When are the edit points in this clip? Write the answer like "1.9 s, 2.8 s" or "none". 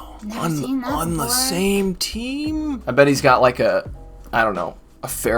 2.8 s